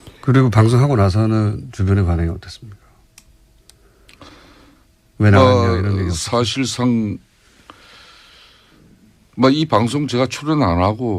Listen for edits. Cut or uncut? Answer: cut